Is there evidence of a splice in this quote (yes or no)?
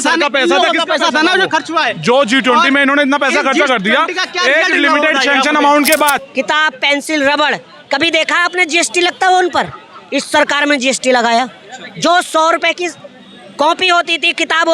yes